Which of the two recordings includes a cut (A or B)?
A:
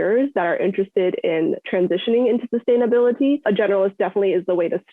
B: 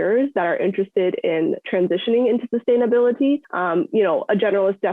A